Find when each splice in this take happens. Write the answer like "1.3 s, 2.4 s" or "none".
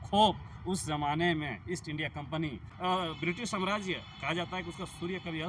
2.7 s